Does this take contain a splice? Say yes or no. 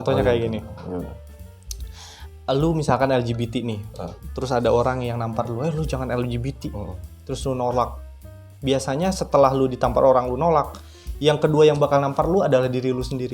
no